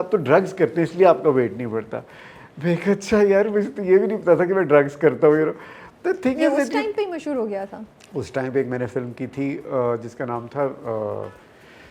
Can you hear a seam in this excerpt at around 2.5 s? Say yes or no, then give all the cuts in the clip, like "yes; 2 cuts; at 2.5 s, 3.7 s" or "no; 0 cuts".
no; 0 cuts